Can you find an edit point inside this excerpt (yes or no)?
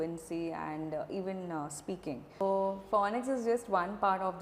yes